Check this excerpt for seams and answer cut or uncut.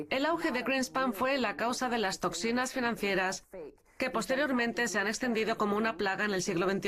uncut